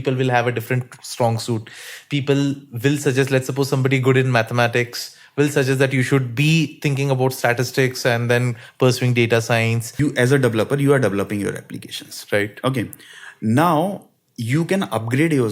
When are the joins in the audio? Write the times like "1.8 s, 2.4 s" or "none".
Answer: 9.9 s